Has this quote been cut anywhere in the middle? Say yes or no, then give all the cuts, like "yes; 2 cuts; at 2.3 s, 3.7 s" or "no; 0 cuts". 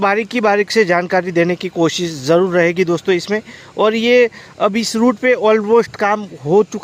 no; 0 cuts